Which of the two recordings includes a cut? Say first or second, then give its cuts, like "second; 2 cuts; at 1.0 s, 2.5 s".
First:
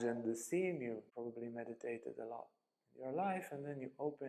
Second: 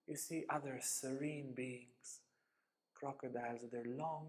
first; 1 cut; at 1.1 s